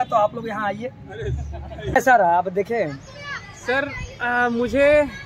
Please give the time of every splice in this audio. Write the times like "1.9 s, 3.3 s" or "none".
2.0 s